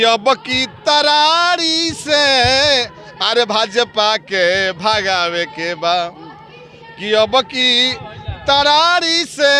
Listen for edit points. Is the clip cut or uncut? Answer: uncut